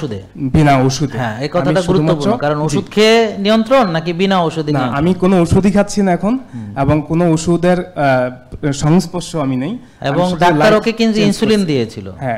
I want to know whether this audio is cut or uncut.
uncut